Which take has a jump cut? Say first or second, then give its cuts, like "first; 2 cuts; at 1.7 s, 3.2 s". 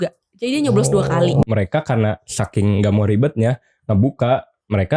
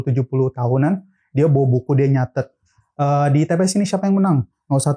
first; 1 cut; at 1.4 s